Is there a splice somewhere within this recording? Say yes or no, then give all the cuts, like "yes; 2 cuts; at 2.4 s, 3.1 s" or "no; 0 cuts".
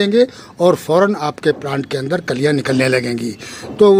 no; 0 cuts